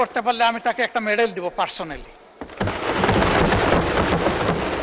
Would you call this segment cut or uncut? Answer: uncut